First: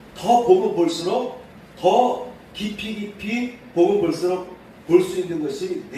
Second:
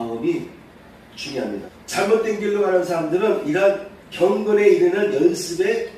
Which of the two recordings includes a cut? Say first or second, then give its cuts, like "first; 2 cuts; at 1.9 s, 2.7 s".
second; 1 cut; at 1.6 s